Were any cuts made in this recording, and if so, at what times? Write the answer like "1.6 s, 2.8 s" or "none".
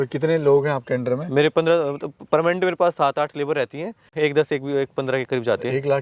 4.1 s